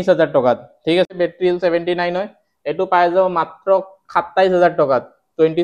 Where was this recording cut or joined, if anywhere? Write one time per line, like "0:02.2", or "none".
0:01.1